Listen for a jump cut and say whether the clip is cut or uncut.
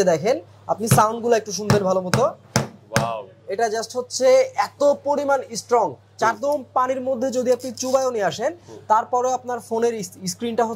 cut